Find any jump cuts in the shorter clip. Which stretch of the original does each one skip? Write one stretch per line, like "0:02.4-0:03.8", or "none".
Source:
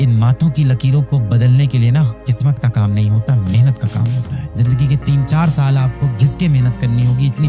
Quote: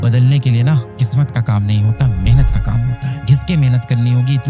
0:04.5-0:06.1